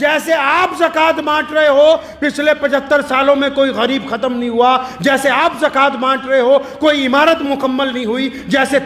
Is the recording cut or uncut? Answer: uncut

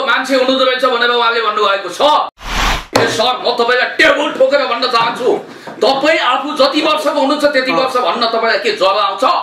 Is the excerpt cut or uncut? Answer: cut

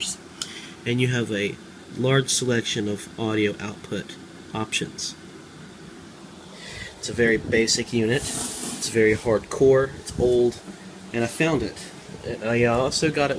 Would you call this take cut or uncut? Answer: uncut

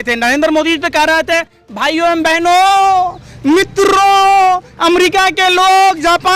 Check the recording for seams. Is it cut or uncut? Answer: uncut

